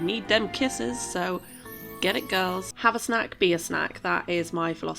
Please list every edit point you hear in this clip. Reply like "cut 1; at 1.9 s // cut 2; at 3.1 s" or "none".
cut 1; at 2.8 s

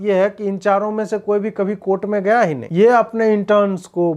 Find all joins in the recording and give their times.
cut 1; at 2.6 s

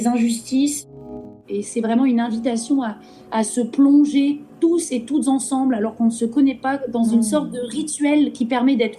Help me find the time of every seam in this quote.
cut 1; at 1.4 s

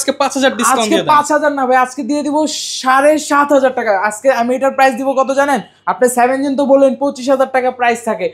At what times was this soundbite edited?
none

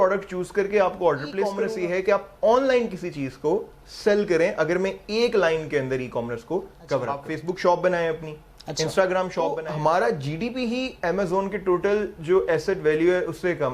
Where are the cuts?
cut 1; at 1.6 s // cut 2; at 7.3 s // cut 3; at 9.6 s

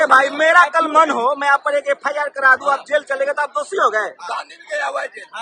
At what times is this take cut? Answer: none

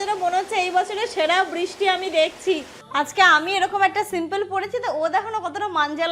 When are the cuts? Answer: cut 1; at 2.8 s

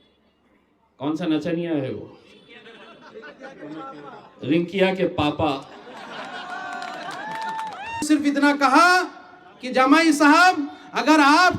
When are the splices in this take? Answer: cut 1; at 8.0 s

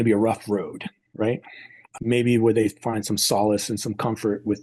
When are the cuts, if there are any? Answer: cut 1; at 1.8 s

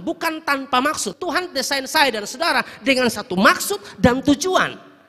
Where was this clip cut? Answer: cut 1; at 1.1 s

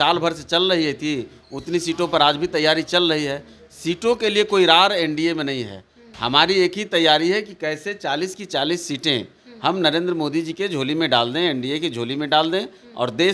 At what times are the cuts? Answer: none

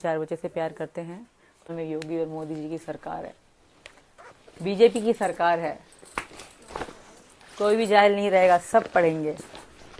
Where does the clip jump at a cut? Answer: cut 1; at 1.7 s

